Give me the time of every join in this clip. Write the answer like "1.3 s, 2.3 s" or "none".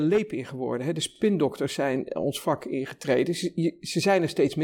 1.1 s